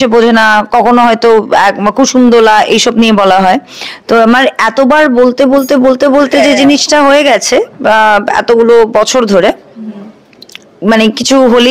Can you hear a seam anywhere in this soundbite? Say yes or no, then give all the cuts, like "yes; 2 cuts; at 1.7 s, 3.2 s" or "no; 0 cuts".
no; 0 cuts